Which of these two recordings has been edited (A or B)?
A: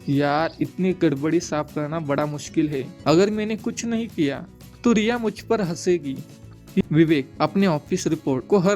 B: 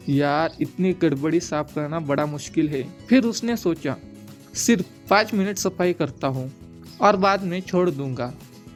A